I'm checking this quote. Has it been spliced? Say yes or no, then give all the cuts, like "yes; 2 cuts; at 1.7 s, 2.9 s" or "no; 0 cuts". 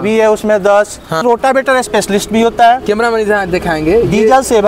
yes; 1 cut; at 1.2 s